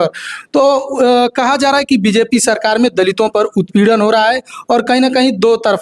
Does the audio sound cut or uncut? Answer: uncut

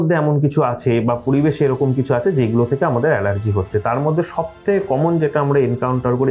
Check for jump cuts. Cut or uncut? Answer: uncut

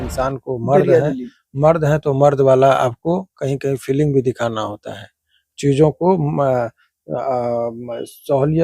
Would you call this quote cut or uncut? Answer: uncut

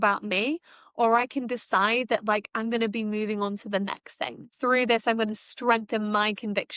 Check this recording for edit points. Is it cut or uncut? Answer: cut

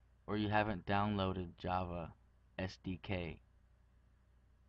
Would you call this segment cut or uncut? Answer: cut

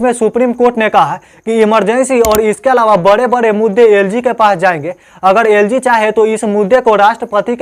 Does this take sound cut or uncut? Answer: uncut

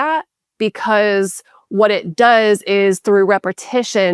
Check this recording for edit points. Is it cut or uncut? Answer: uncut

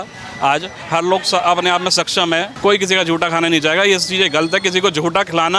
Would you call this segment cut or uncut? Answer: cut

